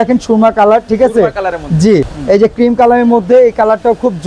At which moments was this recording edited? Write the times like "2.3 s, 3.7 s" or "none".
2.1 s